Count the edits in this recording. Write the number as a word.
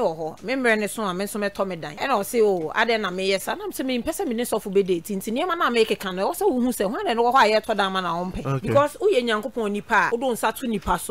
three